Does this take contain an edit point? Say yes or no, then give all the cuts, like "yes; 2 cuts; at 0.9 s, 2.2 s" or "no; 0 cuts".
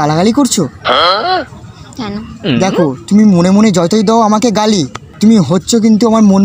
no; 0 cuts